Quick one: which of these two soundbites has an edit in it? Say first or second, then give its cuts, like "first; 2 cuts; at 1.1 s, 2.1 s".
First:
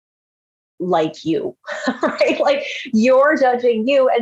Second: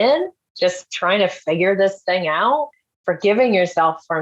second; 1 cut; at 2.7 s